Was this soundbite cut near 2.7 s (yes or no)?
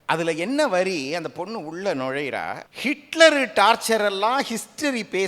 yes